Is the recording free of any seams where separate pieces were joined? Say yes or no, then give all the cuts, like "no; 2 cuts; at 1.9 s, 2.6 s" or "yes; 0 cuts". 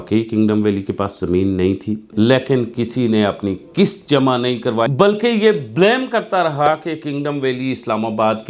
no; 2 cuts; at 2.1 s, 4.9 s